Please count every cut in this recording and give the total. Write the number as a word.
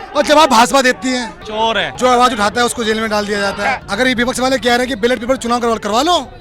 two